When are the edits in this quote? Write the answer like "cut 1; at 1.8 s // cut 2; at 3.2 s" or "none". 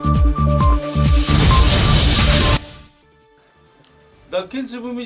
cut 1; at 2.8 s